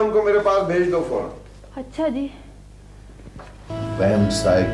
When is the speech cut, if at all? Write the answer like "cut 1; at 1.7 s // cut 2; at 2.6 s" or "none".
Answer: cut 1; at 3.7 s